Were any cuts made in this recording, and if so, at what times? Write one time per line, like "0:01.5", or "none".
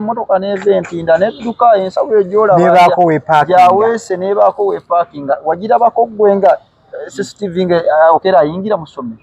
none